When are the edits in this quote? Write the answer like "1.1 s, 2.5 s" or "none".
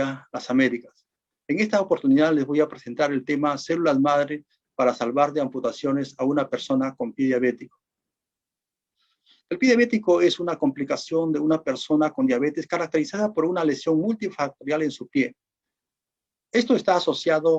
none